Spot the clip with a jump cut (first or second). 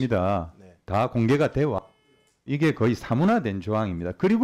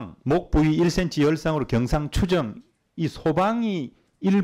first